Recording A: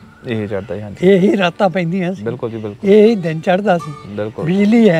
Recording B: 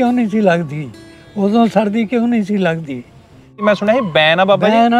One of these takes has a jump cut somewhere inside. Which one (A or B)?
B